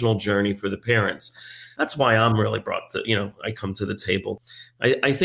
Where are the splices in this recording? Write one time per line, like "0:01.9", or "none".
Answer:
0:01.6
0:04.4